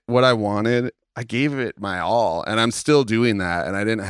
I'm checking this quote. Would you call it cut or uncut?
cut